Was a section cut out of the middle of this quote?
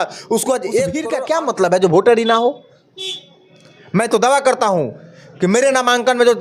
yes; 1 cut; at 1.1 s

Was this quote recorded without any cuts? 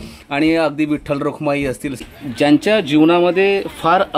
no; 1 cut; at 2.0 s

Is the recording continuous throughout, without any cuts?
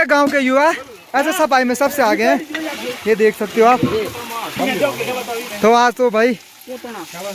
no; 1 cut; at 4.5 s

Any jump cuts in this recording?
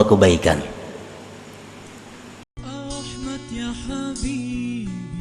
yes; 1 cut; at 2.5 s

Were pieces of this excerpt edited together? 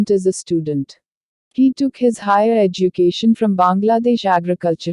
yes; 1 cut; at 1.7 s

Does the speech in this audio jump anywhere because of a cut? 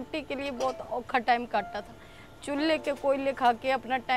no; 0 cuts

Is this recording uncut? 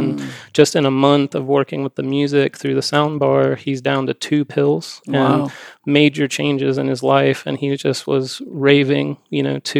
yes; 0 cuts

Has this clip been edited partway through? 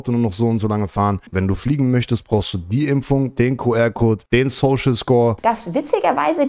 yes; 3 cuts; at 1.2 s, 4.2 s, 5.4 s

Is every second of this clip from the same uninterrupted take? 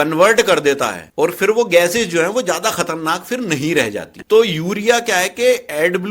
no; 1 cut; at 4.2 s

